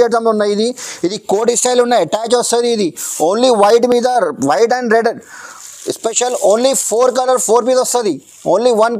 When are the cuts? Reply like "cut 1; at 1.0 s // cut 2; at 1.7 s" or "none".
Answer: none